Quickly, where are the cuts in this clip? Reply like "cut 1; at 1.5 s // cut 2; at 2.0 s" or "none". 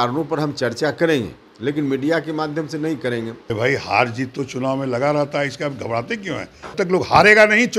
cut 1; at 3.4 s // cut 2; at 6.7 s